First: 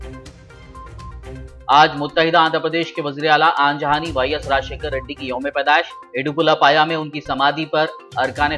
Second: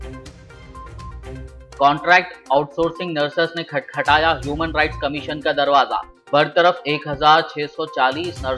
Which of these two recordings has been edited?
second; 1 cut; at 1.3 s

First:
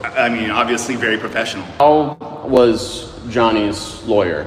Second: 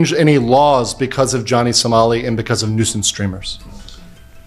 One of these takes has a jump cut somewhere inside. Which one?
first; 1 cut; at 1.6 s

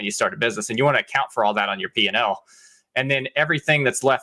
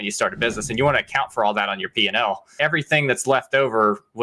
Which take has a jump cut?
second; 1 cut; at 2.5 s

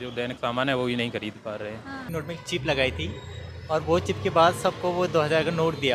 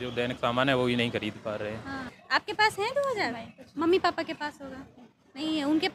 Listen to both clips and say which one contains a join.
first; 1 cut; at 2.1 s

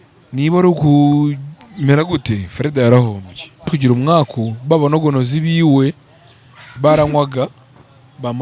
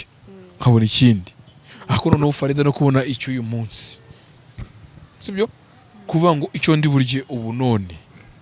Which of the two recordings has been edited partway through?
first; 1 cut; at 3.7 s

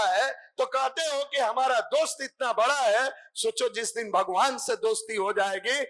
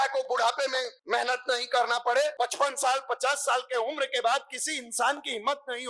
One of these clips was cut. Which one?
second; 2 cuts; at 0.9 s, 2.3 s

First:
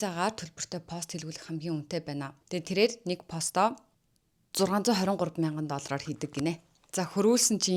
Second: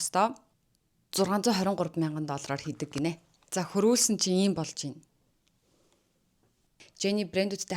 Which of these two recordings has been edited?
second; 1 cut; at 6.8 s

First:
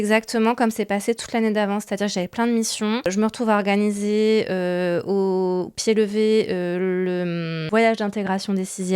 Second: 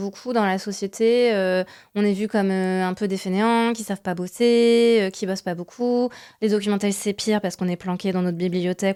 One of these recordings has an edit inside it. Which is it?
first; 2 cuts; at 3.1 s, 7.6 s

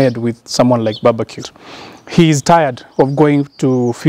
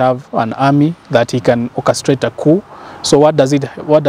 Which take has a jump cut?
first; 1 cut; at 1.5 s

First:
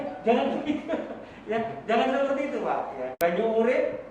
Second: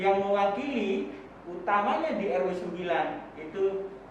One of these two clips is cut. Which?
first; 1 cut; at 3.1 s

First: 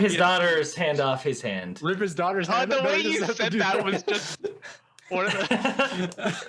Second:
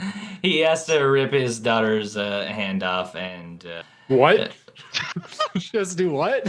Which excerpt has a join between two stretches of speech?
second; 1 cut; at 3.9 s

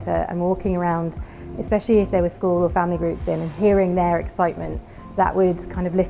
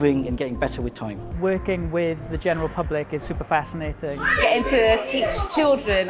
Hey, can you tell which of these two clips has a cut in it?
second; 2 cuts; at 1.2 s, 4.2 s

